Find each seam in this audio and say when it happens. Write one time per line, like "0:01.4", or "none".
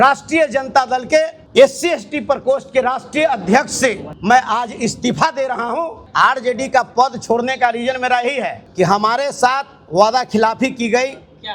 0:01.4
0:04.1
0:06.0
0:08.6